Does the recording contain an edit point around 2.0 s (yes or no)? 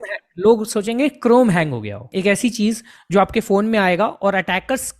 yes